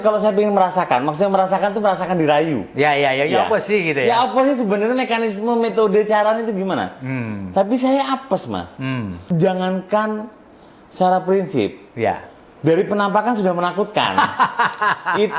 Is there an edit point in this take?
yes; 1 cut; at 9.2 s

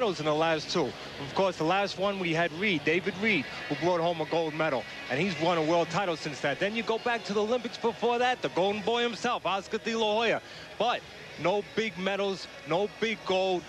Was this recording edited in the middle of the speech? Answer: yes; 1 cut; at 12.6 s

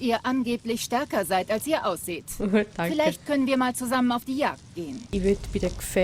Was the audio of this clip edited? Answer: yes; 1 cut; at 5.0 s

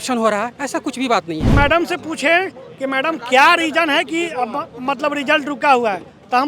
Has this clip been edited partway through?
yes; 1 cut; at 1.5 s

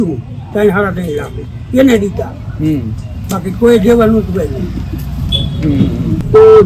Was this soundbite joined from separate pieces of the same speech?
no; 0 cuts

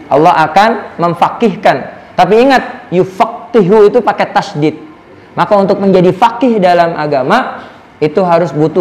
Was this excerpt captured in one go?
yes; 0 cuts

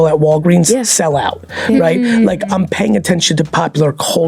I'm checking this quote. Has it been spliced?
no; 0 cuts

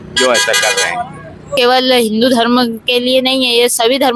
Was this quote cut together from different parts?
yes; 1 cut; at 1.5 s

